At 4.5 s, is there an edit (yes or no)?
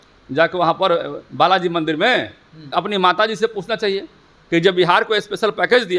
no